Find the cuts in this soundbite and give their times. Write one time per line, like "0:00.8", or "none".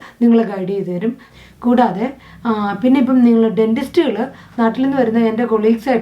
0:01.3